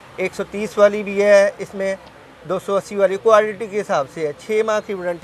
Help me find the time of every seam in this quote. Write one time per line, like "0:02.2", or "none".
none